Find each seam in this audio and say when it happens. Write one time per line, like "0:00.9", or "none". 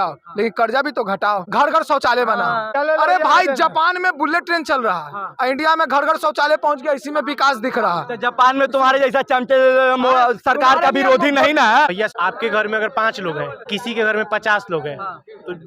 0:01.5
0:02.7
0:12.1